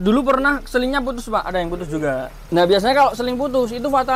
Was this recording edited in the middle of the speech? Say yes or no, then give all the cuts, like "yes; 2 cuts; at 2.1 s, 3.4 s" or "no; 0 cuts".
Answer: yes; 1 cut; at 2.3 s